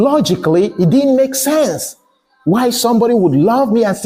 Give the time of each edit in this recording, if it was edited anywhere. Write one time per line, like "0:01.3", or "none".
none